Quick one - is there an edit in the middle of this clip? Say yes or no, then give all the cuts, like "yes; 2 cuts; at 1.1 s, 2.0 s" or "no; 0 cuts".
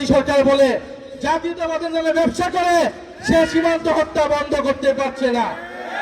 no; 0 cuts